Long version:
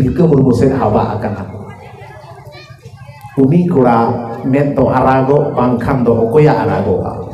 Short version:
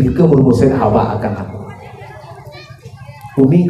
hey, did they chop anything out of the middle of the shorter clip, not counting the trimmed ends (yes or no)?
no